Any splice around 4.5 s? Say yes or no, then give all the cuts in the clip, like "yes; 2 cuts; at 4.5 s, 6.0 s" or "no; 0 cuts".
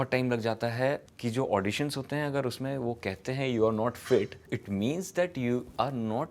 yes; 2 cuts; at 1.1 s, 4.5 s